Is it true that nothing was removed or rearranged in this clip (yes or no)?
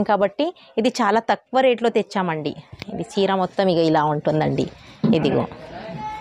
yes